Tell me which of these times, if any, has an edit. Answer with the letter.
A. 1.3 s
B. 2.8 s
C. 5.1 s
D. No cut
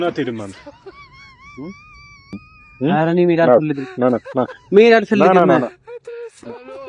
D